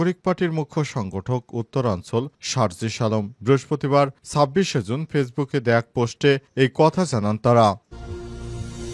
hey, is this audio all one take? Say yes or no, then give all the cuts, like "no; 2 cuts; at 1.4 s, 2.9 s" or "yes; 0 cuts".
no; 1 cut; at 7.8 s